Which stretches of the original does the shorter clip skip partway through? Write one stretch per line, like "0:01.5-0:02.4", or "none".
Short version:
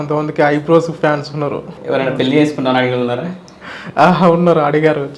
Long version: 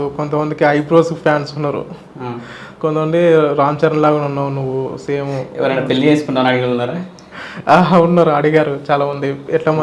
0:02.0-0:05.4